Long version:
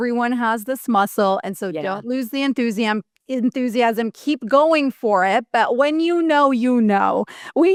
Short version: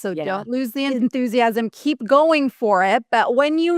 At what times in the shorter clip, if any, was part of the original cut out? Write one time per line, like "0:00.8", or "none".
0:00.9